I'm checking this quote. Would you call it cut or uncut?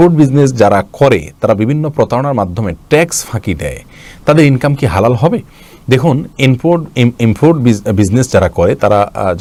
uncut